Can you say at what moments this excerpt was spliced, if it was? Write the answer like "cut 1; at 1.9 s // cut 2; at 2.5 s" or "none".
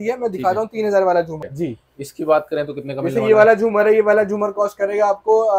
cut 1; at 1.5 s